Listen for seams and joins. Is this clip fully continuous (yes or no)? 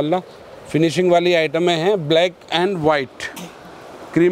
yes